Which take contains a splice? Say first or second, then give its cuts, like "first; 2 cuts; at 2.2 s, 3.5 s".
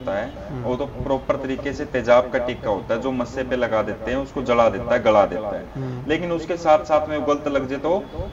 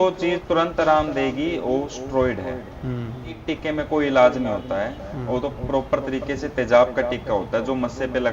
second; 1 cut; at 3.5 s